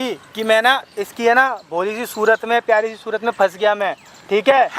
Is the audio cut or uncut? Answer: uncut